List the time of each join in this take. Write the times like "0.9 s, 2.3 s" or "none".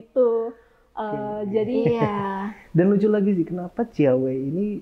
1.8 s